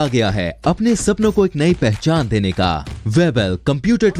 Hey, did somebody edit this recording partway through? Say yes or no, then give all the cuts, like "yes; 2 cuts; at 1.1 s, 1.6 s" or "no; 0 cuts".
yes; 1 cut; at 2.9 s